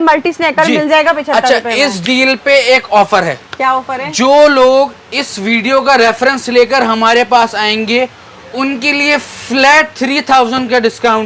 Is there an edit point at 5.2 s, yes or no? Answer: no